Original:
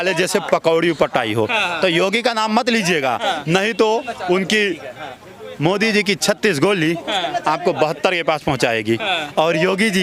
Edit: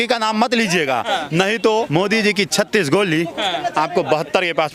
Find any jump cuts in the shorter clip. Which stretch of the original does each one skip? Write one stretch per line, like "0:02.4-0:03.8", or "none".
0:04.0-0:05.6